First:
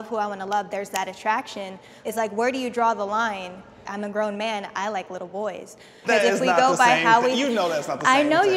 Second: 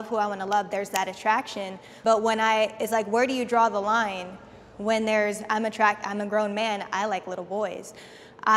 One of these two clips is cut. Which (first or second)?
first